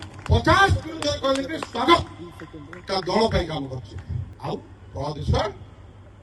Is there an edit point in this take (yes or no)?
yes